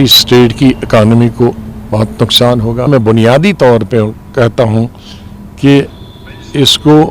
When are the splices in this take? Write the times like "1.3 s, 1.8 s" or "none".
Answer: 2.9 s